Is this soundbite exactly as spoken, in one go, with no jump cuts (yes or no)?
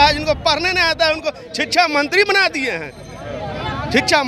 yes